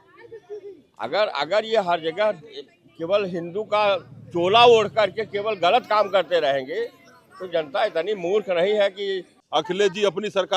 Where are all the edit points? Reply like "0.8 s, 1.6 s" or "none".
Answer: 9.3 s